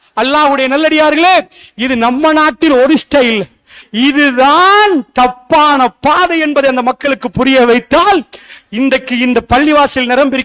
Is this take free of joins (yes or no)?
no